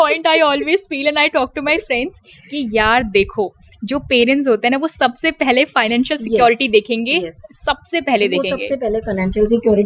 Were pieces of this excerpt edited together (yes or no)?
no